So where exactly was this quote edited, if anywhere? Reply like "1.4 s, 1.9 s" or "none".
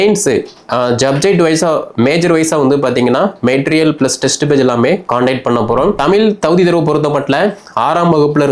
6.0 s